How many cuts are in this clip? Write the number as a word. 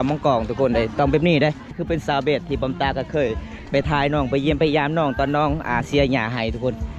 one